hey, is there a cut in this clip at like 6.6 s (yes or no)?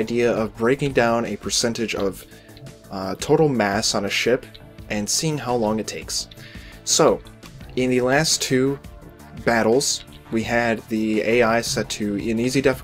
no